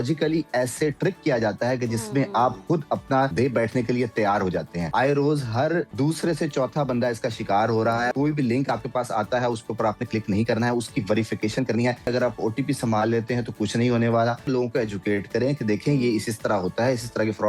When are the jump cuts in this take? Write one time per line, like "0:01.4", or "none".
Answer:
0:03.3
0:04.8
0:05.9
0:08.1
0:12.1
0:14.4